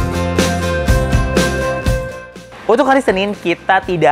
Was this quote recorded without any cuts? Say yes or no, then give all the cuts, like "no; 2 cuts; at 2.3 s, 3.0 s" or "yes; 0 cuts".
no; 1 cut; at 2.5 s